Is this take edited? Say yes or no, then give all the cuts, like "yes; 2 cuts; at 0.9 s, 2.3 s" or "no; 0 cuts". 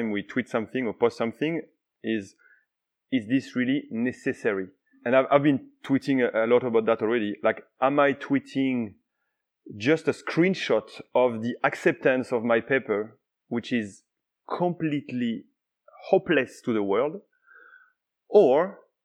yes; 1 cut; at 5.0 s